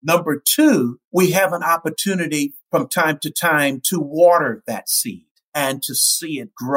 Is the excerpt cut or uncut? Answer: cut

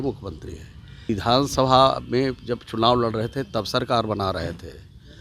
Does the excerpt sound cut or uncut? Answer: cut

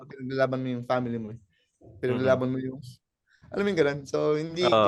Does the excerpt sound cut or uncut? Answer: uncut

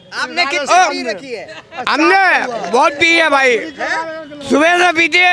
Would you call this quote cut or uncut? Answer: uncut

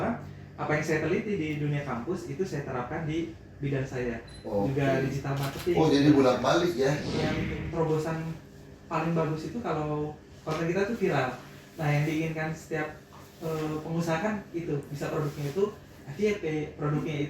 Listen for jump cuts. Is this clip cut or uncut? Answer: cut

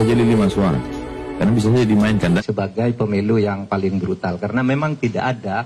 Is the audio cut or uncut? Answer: cut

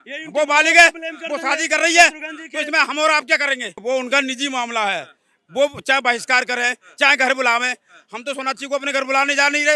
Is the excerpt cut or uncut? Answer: cut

